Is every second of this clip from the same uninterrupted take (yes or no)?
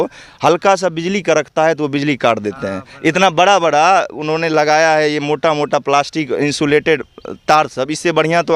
yes